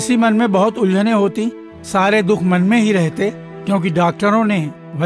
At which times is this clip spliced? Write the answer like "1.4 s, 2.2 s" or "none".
none